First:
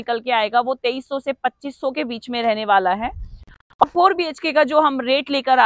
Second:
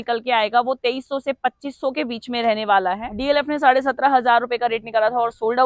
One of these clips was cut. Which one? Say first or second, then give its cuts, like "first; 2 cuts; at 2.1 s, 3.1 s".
second; 1 cut; at 3.1 s